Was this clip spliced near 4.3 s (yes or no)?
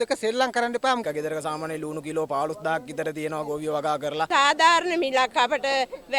yes